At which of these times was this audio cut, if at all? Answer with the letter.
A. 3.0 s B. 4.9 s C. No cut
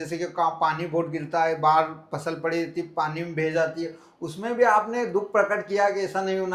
C